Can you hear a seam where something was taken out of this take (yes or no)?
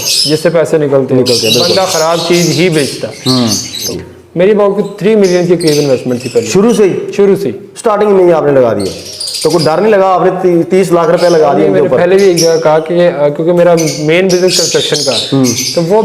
yes